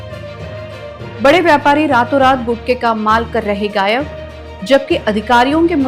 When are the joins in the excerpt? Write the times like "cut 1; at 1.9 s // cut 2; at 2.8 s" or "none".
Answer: cut 1; at 1.1 s